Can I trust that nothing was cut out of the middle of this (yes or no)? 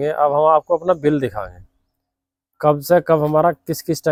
yes